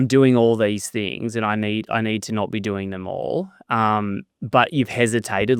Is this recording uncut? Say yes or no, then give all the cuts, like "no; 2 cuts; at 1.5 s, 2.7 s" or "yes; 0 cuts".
yes; 0 cuts